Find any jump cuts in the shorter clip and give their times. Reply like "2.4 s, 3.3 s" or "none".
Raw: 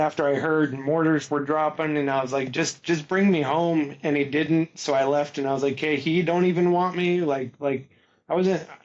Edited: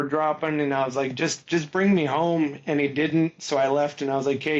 none